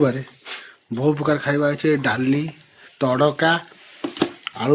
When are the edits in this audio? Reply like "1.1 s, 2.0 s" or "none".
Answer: none